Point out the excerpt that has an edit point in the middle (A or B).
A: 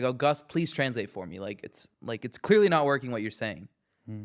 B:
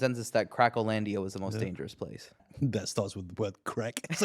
B